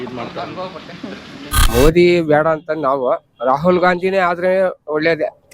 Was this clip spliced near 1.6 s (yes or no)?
yes